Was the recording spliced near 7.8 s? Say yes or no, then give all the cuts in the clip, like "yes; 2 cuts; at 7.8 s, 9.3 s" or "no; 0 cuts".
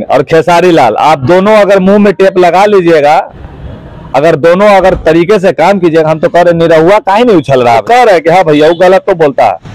yes; 1 cut; at 7.8 s